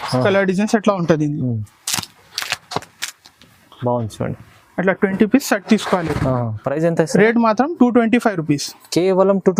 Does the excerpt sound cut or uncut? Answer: uncut